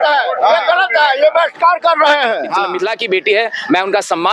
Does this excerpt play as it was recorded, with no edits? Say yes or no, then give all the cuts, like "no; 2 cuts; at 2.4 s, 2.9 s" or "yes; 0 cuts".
no; 1 cut; at 2.8 s